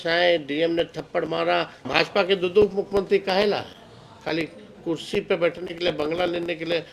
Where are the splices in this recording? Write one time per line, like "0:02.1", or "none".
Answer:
0:01.8

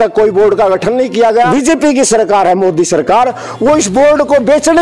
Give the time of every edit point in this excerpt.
0:01.5

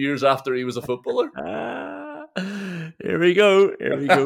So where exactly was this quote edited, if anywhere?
none

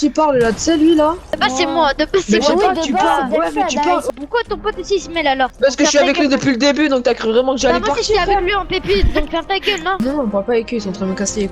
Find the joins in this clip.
0:01.3
0:04.1
0:05.5
0:10.0

